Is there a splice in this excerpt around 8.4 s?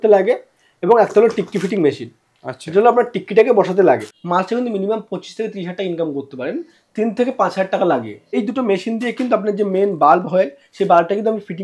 yes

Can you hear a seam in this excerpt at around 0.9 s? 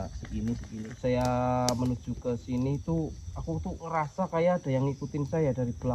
yes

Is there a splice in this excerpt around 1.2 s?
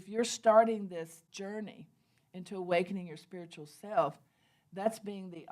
yes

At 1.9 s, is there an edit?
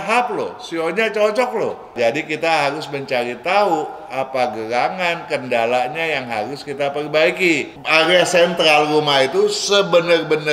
yes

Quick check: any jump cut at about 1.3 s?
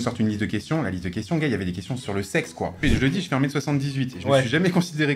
no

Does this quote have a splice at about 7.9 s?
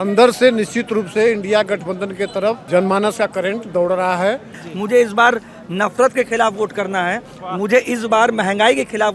no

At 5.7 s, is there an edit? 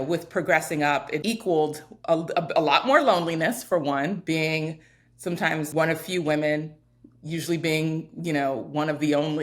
yes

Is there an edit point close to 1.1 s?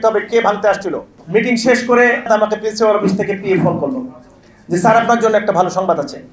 yes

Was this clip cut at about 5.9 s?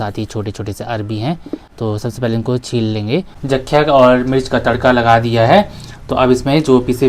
no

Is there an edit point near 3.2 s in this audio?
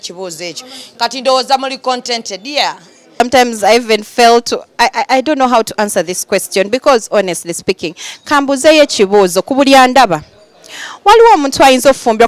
yes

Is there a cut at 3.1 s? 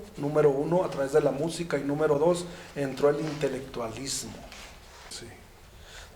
no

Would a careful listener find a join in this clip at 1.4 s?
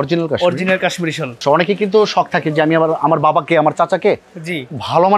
yes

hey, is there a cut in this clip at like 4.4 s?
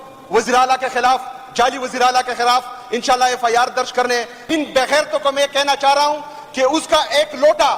yes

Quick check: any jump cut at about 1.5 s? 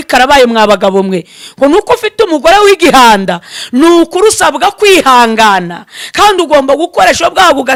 no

